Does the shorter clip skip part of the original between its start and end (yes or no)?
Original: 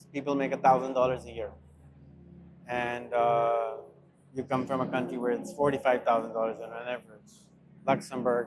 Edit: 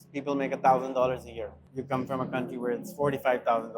yes